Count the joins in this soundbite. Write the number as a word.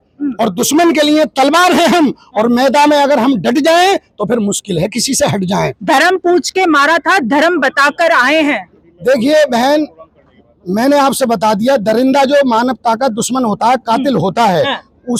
zero